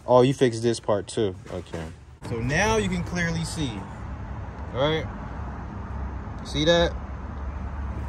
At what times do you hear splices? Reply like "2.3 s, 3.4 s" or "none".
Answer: 2.3 s